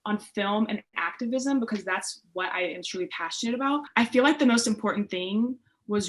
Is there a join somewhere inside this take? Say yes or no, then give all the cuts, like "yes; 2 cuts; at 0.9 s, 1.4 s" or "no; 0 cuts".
yes; 1 cut; at 3.9 s